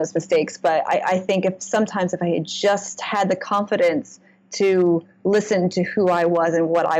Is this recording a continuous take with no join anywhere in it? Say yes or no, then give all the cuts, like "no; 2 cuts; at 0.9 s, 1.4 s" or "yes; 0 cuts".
yes; 0 cuts